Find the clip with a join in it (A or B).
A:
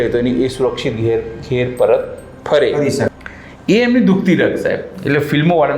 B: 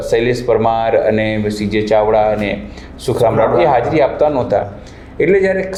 A